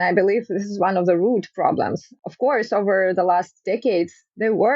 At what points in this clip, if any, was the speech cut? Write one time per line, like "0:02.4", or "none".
0:02.2

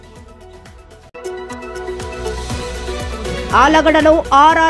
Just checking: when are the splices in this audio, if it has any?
0:01.0
0:02.9

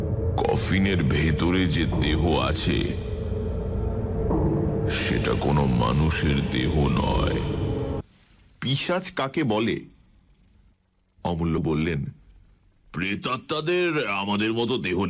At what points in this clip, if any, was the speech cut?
0:08.0

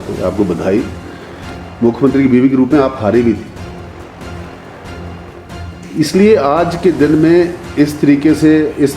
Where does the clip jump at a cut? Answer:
none

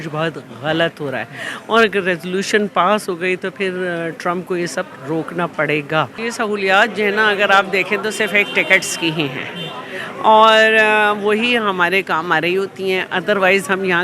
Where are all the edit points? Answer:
0:06.3

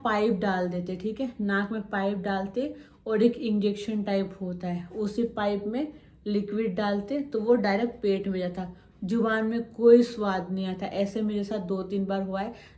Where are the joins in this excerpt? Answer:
none

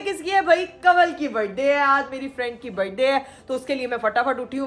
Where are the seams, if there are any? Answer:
none

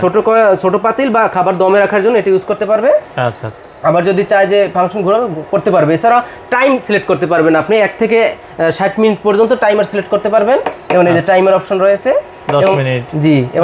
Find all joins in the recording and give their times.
none

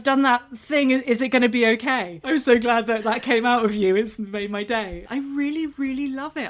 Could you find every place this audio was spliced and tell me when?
0:02.1
0:05.0

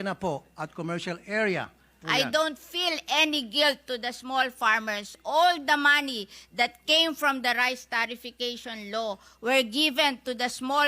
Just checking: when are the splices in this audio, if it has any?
0:02.0

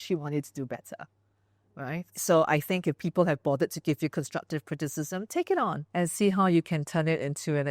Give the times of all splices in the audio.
0:02.1
0:05.8

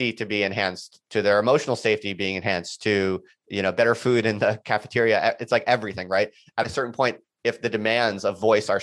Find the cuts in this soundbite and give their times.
none

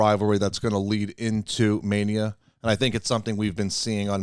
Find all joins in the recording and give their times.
none

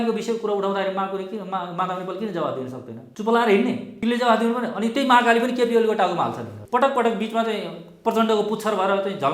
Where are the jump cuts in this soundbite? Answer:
0:03.0
0:03.9
0:06.5

